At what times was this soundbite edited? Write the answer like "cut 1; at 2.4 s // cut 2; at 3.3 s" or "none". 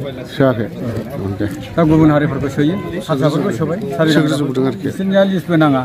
cut 1; at 3.0 s